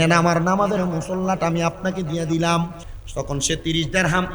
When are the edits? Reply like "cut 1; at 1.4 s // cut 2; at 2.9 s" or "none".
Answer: cut 1; at 3.0 s